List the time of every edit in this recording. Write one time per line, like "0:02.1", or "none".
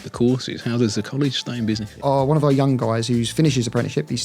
0:01.9

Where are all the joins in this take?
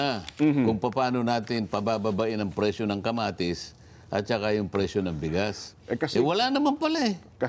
none

